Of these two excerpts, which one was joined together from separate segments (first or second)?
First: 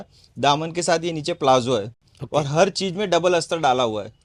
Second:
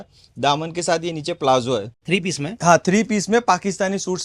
second